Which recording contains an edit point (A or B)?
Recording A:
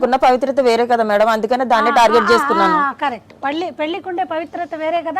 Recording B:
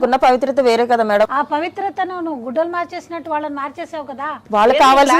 B